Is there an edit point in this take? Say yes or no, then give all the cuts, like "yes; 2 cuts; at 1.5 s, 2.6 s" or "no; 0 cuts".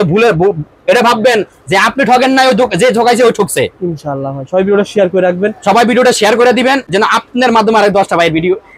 no; 0 cuts